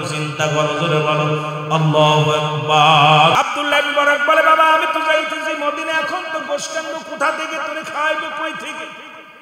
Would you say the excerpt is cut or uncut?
cut